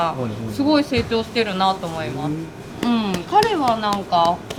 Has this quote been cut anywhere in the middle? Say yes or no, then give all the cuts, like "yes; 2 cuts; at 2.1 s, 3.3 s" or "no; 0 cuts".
no; 0 cuts